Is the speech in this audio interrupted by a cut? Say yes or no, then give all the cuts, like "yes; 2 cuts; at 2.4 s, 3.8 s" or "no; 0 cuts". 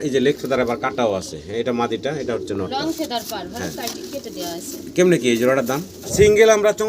yes; 1 cut; at 6.0 s